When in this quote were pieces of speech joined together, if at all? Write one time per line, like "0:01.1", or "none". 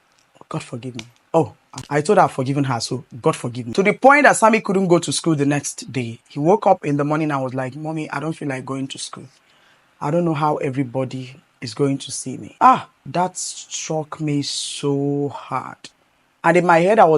0:01.7
0:03.5
0:12.4
0:13.0